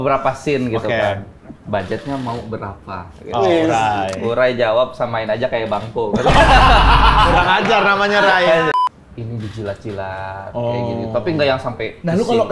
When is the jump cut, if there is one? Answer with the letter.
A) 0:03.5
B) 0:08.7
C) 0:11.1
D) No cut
B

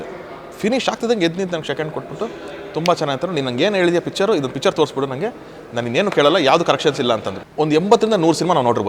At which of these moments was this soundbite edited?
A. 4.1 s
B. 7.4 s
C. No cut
B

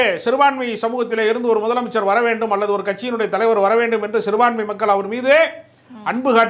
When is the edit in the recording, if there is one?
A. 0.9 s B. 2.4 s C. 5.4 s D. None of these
D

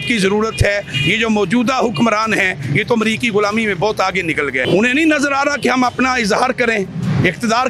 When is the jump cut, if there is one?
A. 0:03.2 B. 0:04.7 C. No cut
B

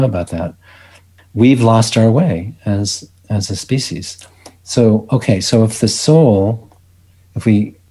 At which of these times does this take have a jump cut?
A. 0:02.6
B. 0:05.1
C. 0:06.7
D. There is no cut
D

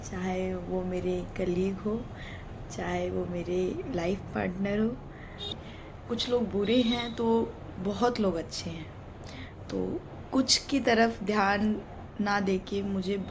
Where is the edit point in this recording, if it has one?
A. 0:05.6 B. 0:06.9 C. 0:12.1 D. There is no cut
A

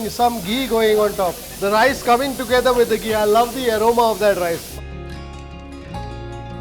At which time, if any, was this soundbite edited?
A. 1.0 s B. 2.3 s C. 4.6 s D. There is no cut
C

